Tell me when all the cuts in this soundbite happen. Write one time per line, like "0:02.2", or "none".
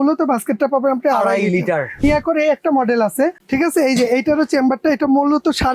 0:02.0
0:03.4